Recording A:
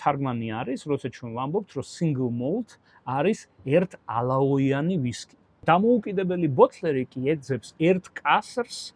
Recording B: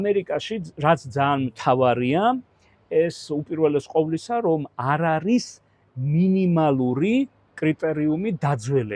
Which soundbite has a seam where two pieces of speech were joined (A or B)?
A